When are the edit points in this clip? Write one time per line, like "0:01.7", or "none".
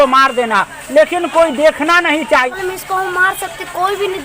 0:02.5